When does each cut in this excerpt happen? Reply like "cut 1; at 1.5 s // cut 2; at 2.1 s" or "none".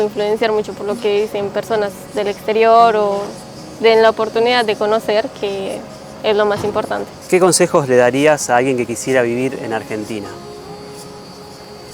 cut 1; at 7.1 s